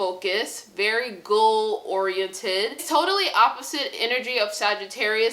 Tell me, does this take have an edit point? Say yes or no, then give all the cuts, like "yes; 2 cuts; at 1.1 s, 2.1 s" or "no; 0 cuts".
yes; 1 cut; at 2.8 s